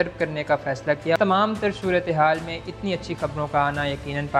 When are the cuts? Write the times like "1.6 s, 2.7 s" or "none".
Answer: 1.2 s